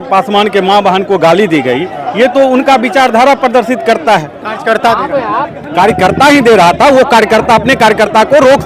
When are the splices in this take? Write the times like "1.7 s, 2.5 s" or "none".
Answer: none